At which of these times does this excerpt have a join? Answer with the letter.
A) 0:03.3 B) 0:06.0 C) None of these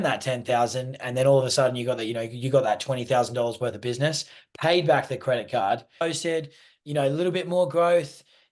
B